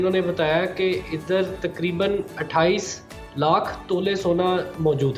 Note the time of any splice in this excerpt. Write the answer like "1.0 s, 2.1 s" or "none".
none